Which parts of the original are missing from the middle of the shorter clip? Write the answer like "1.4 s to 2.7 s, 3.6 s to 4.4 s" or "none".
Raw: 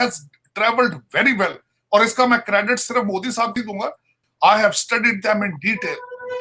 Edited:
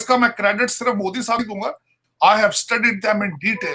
3.7 s to 3.8 s